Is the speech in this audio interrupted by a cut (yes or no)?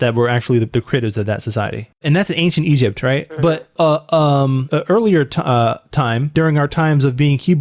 yes